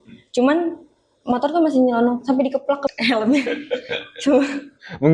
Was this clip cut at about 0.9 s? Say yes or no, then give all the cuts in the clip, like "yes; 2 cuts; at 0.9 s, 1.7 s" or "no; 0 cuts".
no; 1 cut; at 2.9 s